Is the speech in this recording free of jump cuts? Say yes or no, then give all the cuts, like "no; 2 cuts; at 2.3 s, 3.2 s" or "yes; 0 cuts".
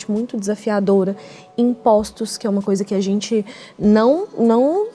yes; 0 cuts